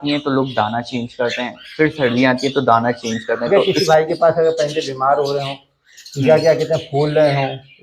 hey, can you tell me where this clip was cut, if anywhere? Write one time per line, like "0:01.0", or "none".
0:03.5